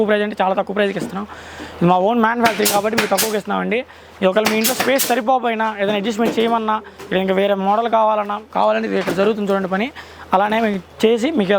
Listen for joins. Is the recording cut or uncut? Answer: uncut